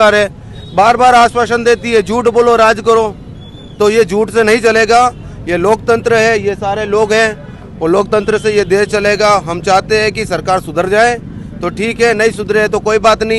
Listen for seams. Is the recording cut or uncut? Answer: uncut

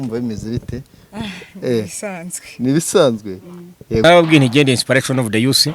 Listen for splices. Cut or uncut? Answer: cut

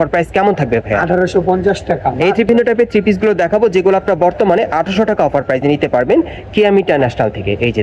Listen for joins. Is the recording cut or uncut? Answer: cut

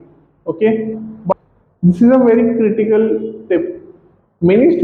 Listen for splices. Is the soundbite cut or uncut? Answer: cut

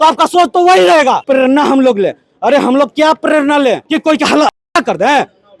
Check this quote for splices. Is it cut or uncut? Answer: cut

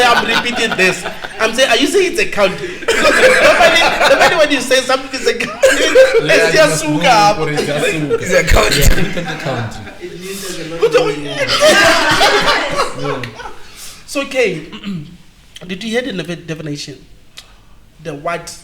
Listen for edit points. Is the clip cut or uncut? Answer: uncut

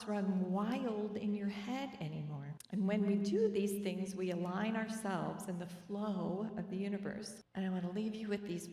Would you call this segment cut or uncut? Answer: uncut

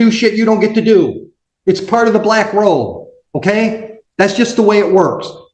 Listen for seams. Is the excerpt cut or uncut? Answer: uncut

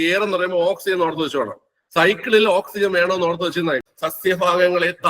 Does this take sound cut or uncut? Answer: cut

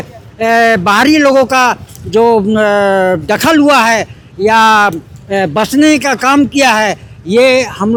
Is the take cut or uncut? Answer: uncut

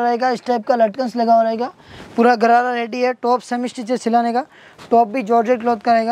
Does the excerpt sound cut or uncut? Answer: uncut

